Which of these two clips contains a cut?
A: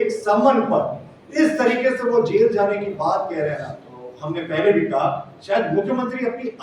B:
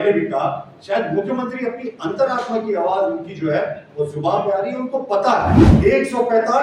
B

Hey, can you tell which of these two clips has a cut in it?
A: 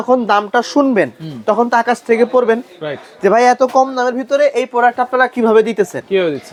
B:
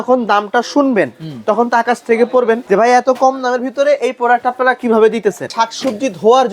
B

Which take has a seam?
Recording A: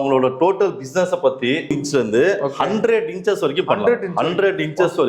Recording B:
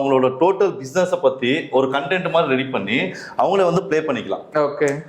A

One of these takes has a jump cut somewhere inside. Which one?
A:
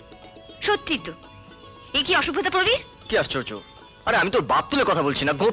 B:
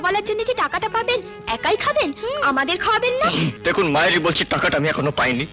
B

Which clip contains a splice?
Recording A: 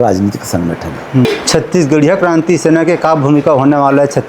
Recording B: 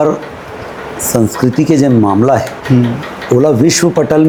A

